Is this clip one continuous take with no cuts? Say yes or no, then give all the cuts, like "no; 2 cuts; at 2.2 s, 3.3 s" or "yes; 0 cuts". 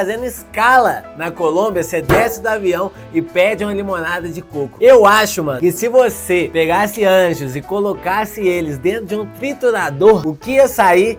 yes; 0 cuts